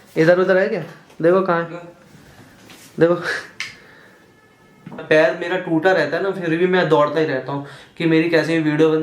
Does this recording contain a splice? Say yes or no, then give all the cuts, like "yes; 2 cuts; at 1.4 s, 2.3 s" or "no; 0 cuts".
yes; 1 cut; at 5.0 s